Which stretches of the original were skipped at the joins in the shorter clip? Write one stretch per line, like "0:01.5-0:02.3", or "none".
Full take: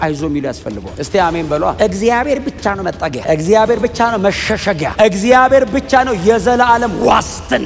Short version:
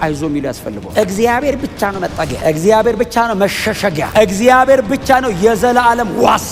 0:00.9-0:01.7